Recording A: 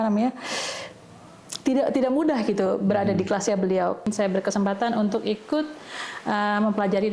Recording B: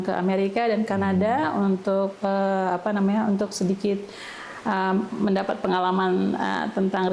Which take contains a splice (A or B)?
A